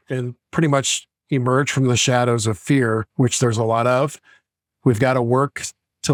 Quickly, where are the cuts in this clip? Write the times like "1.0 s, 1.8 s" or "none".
none

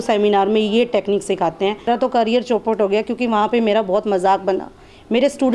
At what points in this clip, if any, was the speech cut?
1.8 s

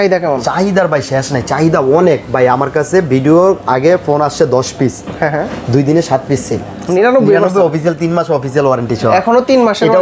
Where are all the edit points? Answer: 6.8 s

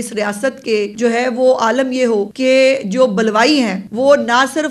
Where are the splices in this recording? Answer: 0.9 s, 2.3 s, 3.8 s

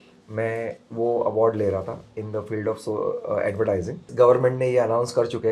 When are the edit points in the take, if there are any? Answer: 4.1 s

